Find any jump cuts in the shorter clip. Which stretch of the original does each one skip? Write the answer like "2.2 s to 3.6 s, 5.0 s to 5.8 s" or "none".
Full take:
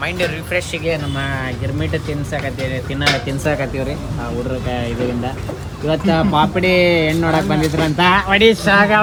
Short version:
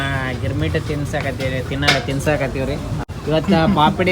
4.2 s to 5.6 s